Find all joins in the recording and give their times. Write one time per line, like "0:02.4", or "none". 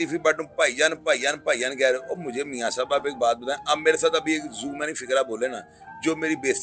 none